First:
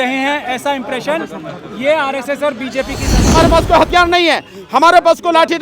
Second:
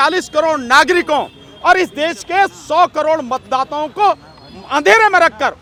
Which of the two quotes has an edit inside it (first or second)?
first